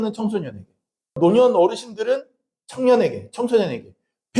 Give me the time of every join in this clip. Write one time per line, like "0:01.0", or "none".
0:01.1